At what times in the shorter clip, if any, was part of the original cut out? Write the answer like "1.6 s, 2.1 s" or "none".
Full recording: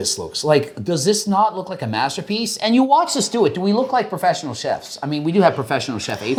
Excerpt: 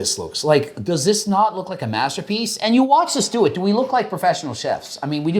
none